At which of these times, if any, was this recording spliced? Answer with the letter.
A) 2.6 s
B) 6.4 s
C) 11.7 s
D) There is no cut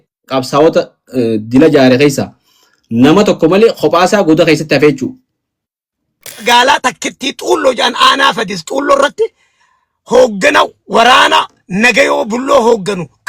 B